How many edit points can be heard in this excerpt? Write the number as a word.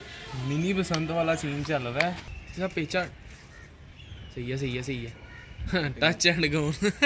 one